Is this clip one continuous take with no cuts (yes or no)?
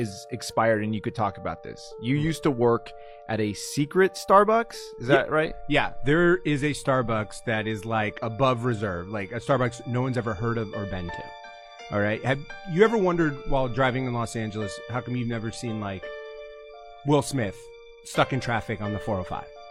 yes